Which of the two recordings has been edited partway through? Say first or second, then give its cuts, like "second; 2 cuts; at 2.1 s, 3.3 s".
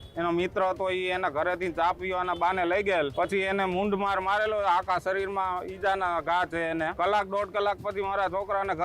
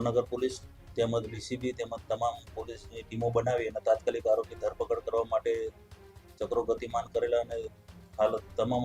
first; 2 cuts; at 3.1 s, 6.9 s